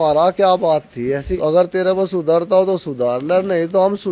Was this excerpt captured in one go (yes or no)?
no